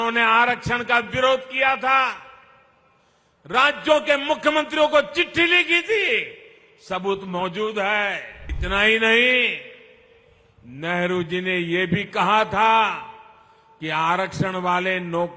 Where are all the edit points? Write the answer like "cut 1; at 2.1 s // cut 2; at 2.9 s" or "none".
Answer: cut 1; at 8.5 s